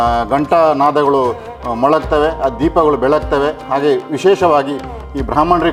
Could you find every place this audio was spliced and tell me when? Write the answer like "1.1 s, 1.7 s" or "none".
none